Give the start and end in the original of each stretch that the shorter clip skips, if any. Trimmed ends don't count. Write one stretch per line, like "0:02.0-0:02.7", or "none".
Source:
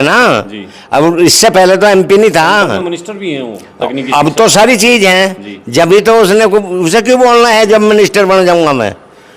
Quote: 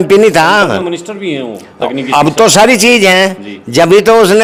none